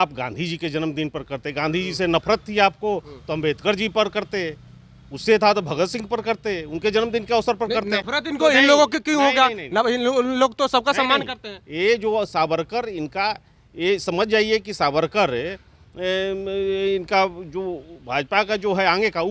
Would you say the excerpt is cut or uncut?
uncut